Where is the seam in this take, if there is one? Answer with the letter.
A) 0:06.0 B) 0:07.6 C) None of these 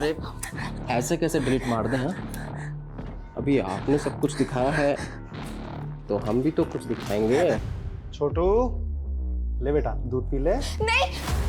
B